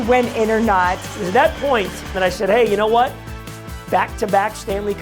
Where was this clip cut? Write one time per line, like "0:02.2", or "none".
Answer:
0:01.1
0:02.1